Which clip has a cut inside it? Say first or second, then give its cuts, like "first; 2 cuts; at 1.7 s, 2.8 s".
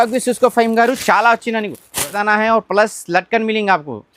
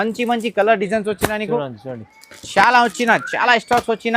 first; 1 cut; at 2.1 s